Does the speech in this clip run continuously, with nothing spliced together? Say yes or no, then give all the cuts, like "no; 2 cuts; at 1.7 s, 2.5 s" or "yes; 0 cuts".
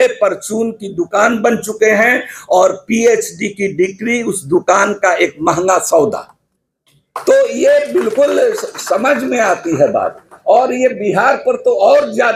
yes; 0 cuts